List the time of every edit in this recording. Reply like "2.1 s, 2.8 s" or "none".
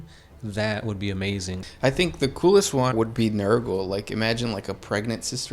1.6 s, 2.9 s